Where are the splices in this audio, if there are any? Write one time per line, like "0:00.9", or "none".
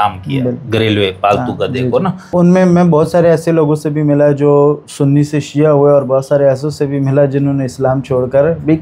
0:02.3